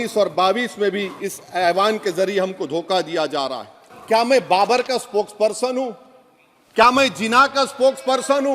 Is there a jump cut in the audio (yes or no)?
yes